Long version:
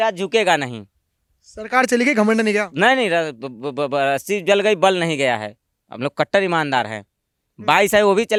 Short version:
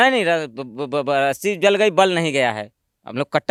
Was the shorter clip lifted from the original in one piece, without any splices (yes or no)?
yes